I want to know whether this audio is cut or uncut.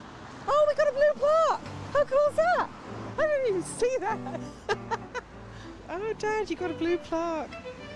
cut